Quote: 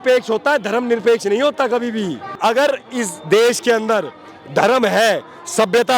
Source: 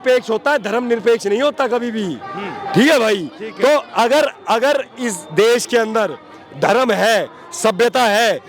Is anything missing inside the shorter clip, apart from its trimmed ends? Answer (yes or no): yes